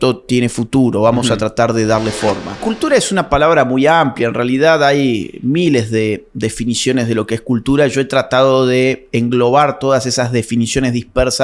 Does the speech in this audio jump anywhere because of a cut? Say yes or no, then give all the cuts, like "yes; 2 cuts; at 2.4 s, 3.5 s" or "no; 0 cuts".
yes; 1 cut; at 2.6 s